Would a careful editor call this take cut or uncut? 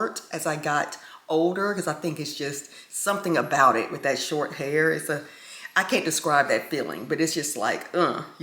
uncut